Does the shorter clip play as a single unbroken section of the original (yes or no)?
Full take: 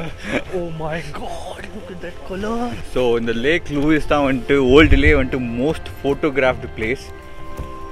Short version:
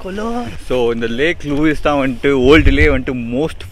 yes